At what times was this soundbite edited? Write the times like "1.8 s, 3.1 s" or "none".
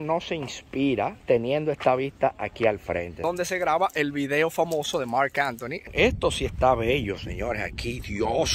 1.2 s, 3.2 s, 5.9 s